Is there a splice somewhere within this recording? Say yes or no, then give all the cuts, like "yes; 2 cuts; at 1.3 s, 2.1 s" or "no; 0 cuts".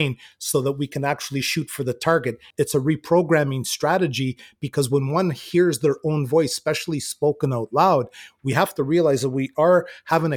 yes; 1 cut; at 2.5 s